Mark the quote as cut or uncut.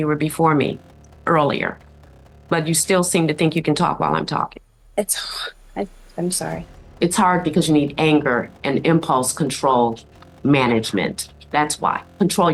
uncut